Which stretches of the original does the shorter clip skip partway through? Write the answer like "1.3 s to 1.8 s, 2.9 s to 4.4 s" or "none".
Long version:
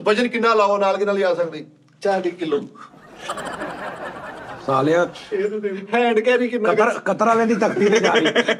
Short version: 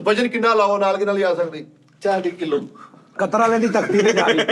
3.1 s to 7.0 s